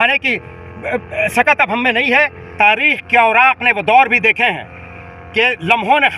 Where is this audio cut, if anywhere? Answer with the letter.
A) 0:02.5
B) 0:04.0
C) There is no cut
A